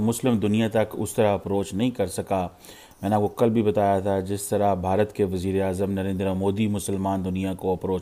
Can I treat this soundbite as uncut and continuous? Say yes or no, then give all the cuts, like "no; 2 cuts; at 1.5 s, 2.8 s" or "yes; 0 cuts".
yes; 0 cuts